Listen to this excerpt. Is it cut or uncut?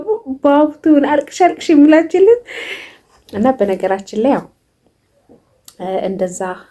uncut